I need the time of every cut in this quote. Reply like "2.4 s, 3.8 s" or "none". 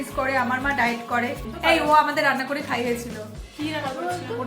1.5 s